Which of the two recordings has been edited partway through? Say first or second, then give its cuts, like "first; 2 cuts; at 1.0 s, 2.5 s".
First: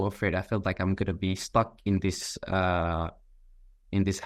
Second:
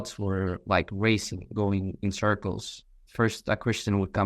second; 1 cut; at 3.0 s